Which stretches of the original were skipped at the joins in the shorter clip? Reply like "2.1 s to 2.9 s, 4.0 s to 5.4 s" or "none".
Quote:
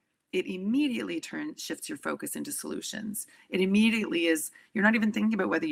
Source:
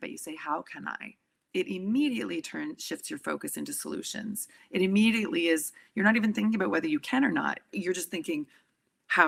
none